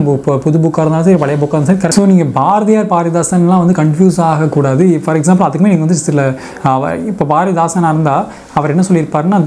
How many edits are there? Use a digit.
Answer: 1